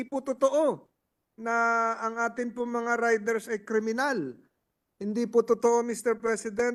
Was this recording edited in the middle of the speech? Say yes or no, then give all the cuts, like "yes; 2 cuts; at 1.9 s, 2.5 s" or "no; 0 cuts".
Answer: no; 0 cuts